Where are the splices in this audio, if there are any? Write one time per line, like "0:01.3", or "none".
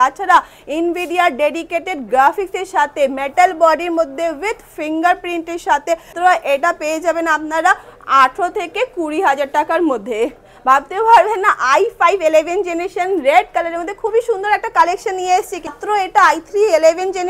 0:06.1
0:15.7